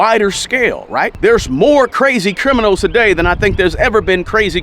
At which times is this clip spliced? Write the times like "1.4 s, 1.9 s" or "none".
1.1 s